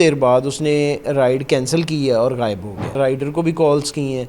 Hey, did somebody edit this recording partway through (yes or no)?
yes